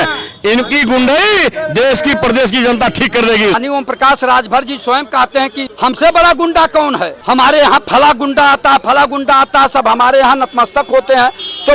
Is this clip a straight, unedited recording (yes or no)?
no